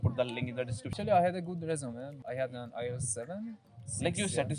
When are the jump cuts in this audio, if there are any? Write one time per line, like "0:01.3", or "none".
0:01.0
0:02.1
0:03.7